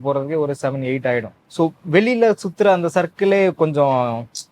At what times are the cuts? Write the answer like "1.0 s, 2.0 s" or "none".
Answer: 1.4 s